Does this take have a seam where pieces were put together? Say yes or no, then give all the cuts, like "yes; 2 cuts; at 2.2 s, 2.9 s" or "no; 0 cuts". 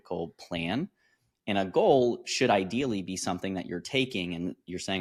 no; 0 cuts